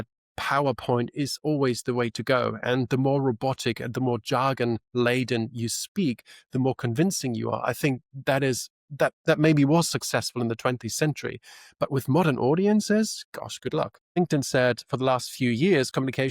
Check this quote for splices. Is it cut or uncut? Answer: cut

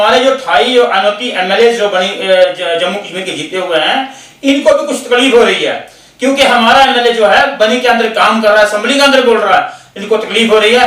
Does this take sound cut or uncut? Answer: uncut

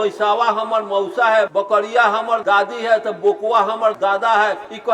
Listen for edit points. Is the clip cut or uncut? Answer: cut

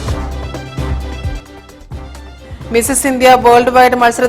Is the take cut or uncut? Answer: cut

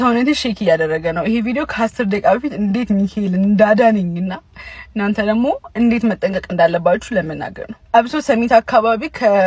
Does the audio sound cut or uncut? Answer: uncut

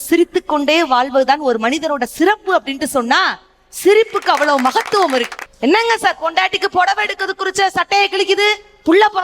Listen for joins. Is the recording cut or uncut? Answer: cut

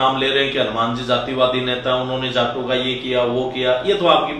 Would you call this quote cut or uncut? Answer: uncut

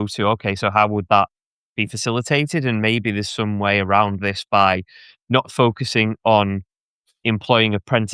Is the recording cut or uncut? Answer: uncut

